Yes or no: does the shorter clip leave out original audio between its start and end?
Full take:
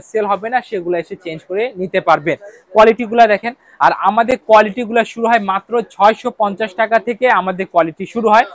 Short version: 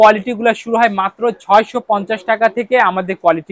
no